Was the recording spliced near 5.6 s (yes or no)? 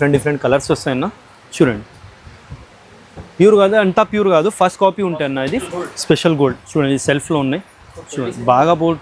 yes